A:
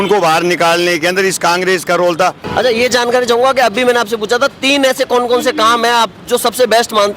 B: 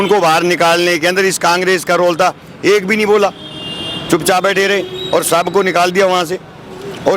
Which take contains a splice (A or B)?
A